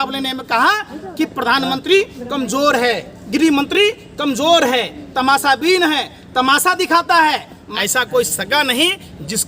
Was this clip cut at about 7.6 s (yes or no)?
yes